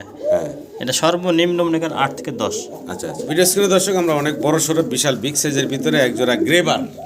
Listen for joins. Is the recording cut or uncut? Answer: cut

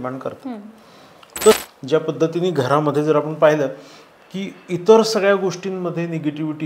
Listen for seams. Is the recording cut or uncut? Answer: cut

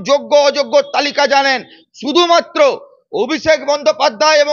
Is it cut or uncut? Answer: uncut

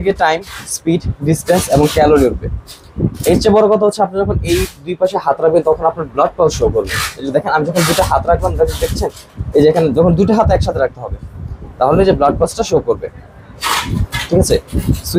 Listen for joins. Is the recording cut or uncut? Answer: uncut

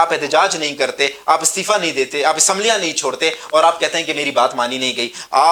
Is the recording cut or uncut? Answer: uncut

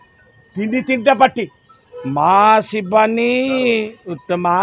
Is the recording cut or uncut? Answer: uncut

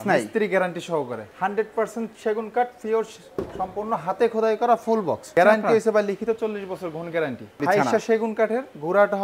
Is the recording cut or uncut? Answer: cut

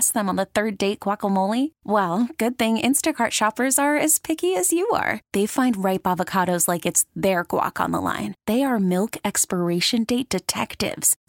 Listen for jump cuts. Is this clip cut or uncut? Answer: uncut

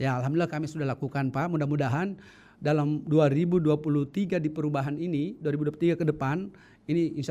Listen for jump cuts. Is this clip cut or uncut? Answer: uncut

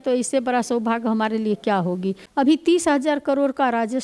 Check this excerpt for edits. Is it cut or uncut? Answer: cut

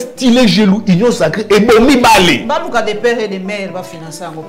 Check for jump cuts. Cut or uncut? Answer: uncut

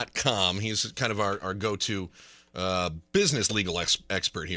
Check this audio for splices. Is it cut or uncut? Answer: uncut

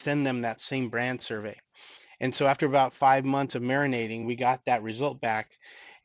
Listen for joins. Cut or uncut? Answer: uncut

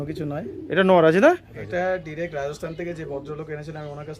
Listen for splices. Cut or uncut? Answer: cut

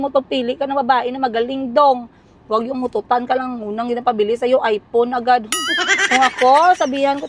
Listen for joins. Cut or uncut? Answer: uncut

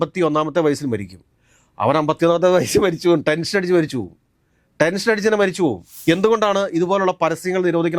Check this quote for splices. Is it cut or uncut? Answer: cut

